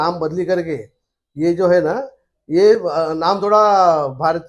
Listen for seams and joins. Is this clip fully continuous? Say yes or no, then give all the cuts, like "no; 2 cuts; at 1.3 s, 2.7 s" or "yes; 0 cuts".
yes; 0 cuts